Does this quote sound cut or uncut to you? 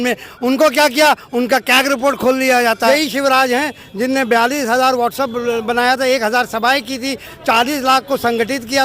cut